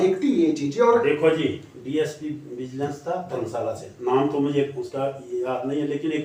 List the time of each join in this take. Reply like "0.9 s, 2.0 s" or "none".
none